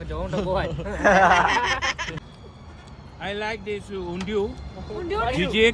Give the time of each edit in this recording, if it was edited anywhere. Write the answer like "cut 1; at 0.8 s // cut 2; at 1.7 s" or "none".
cut 1; at 2.2 s